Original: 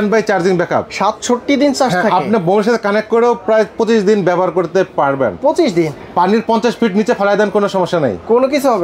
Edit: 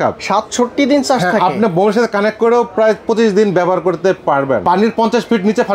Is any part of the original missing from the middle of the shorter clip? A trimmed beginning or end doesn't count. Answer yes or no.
yes